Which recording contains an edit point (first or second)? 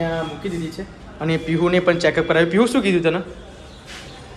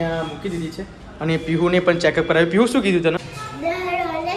second